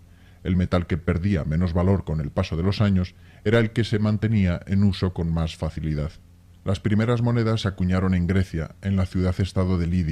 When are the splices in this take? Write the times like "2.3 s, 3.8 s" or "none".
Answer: 9.1 s